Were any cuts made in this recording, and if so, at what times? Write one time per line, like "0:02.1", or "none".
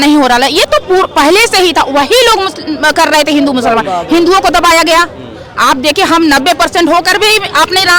none